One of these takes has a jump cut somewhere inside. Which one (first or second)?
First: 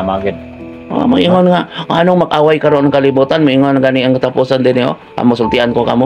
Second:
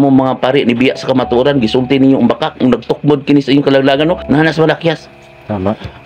second